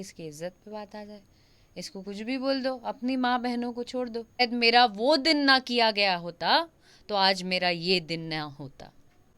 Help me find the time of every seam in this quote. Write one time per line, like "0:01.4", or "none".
0:04.4